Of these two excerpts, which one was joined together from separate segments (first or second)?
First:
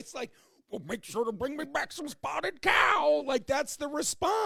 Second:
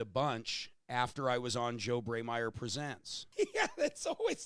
second